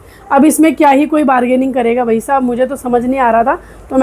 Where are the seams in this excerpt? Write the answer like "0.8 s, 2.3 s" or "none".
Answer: none